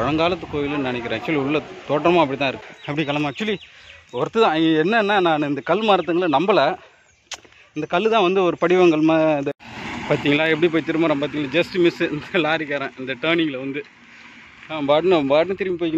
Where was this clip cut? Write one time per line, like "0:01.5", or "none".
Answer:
0:02.7
0:09.5